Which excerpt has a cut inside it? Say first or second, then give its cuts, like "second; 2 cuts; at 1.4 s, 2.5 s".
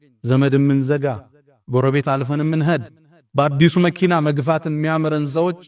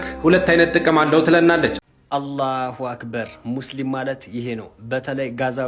second; 1 cut; at 1.9 s